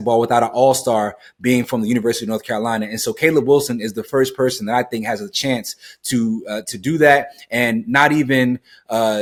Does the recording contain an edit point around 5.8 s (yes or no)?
no